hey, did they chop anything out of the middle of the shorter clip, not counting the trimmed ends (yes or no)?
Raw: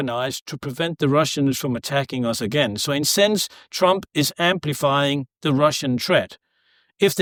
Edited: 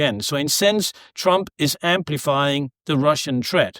no